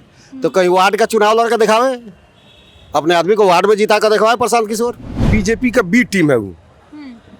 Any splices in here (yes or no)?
yes